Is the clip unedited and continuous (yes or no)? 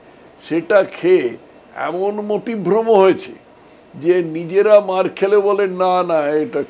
yes